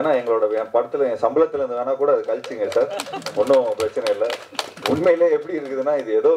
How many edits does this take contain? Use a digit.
0